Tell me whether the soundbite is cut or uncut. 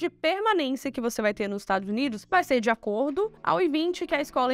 uncut